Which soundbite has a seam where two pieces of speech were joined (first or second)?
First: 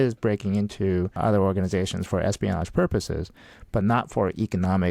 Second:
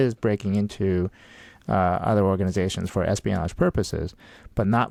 first